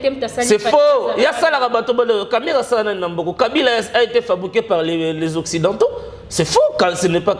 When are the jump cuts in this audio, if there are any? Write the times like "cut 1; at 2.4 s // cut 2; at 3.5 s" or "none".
none